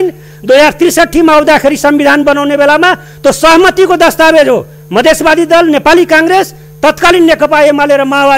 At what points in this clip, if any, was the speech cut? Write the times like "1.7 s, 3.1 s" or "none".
none